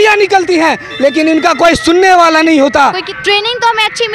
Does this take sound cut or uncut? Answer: cut